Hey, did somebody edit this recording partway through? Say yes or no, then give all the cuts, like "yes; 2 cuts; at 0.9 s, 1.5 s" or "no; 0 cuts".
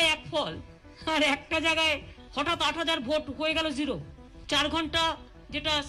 no; 0 cuts